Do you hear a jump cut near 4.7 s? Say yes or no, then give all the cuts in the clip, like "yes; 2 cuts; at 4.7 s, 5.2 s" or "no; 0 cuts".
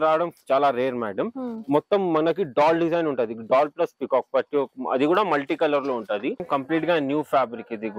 no; 1 cut; at 6.4 s